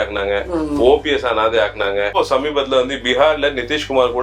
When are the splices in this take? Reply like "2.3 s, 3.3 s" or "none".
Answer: 2.2 s